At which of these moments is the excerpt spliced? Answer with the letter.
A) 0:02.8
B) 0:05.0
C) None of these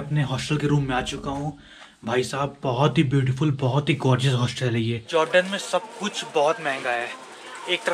B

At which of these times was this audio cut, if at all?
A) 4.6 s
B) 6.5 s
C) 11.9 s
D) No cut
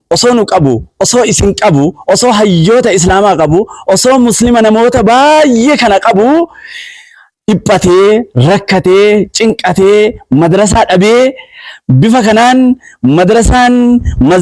D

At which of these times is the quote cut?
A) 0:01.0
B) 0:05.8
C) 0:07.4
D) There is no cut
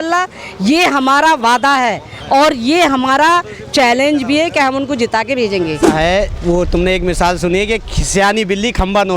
B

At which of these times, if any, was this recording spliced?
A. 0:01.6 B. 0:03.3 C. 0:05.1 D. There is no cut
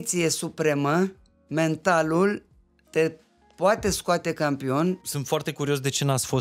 C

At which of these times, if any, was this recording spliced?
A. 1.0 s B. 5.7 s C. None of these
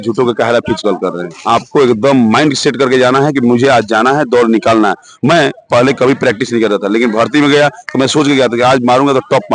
A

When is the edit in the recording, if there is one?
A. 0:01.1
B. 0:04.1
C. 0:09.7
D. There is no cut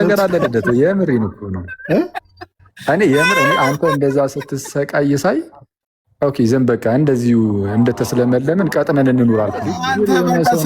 C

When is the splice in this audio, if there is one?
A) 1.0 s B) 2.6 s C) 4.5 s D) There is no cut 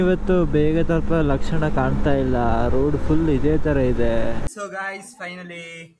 C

